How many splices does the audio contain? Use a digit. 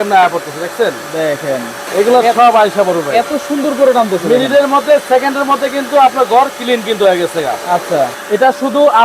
2